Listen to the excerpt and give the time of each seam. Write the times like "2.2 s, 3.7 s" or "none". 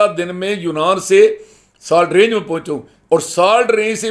none

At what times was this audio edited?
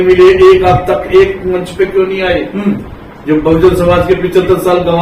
none

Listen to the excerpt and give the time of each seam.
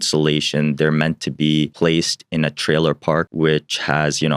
1.7 s, 3.3 s

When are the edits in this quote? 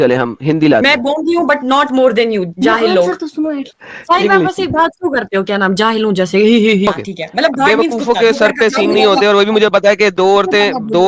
3.7 s, 6.9 s

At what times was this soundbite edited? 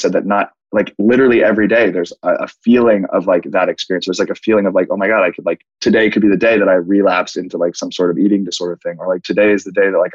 none

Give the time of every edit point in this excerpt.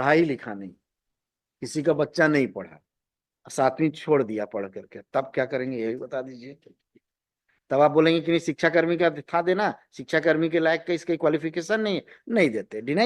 none

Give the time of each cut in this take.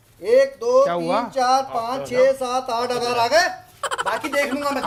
none

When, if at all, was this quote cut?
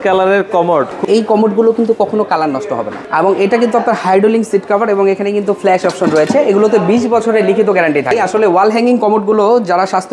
1.0 s, 3.0 s, 8.3 s

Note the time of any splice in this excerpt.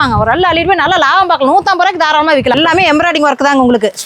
2.5 s

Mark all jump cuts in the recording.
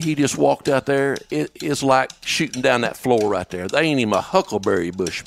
3.7 s

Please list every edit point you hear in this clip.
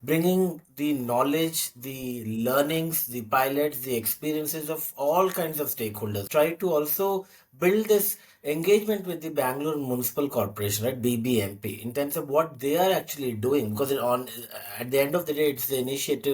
6.2 s

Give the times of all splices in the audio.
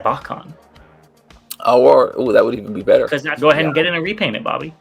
3.2 s

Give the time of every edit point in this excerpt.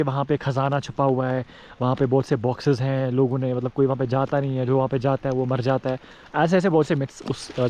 none

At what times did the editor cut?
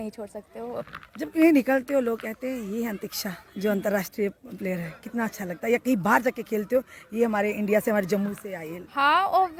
none

